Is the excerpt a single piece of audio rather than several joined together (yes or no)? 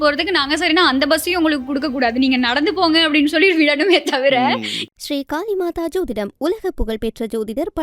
no